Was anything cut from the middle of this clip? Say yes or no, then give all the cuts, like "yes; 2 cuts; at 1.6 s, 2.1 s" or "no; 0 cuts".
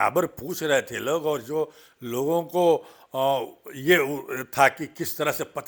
no; 0 cuts